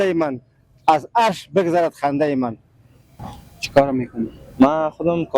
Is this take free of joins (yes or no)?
no